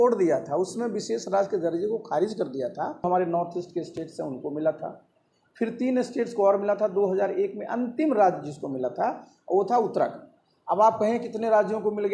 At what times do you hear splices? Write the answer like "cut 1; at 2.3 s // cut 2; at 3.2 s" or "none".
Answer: cut 1; at 3.0 s